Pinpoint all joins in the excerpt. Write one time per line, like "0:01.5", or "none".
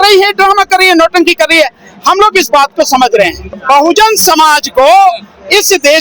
0:03.5